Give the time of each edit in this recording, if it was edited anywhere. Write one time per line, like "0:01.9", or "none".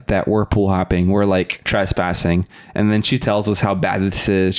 0:01.7